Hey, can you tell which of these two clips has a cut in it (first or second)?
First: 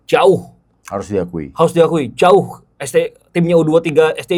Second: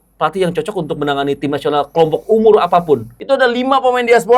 second